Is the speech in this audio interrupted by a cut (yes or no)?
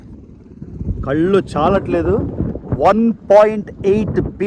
no